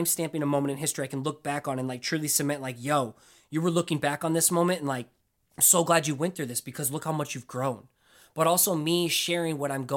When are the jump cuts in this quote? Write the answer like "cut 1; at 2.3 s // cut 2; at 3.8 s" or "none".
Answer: none